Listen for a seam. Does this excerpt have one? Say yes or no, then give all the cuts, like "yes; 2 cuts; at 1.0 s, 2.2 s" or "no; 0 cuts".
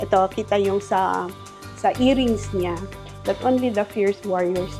no; 0 cuts